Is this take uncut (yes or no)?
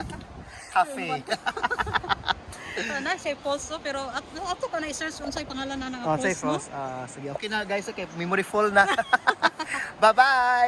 yes